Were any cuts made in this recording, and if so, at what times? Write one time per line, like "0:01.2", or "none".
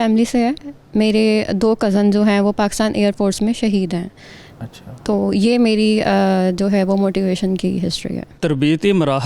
0:08.3